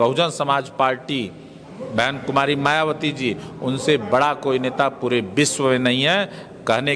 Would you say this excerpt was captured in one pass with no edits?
yes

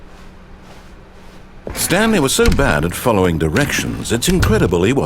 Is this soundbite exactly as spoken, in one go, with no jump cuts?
no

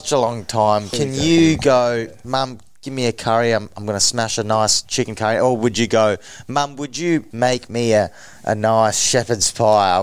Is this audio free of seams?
no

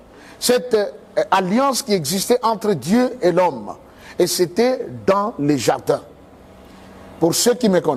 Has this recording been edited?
no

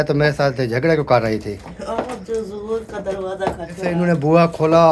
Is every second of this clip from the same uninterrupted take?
no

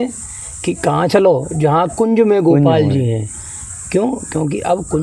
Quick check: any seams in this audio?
no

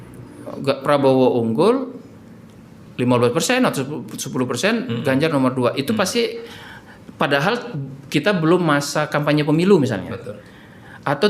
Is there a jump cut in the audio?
no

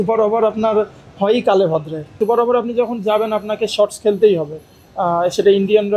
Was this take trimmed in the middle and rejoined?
yes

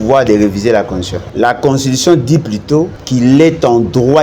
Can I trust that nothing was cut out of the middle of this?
no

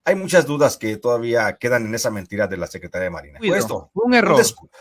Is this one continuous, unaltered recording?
no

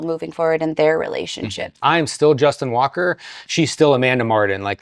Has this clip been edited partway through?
yes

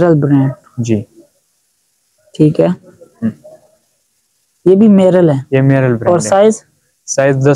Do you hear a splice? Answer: no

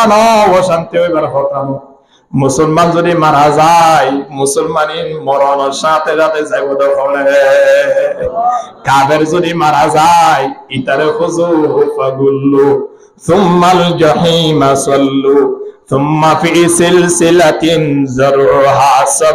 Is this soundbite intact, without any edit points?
yes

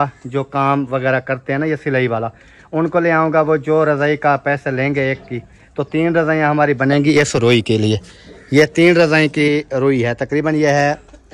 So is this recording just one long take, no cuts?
yes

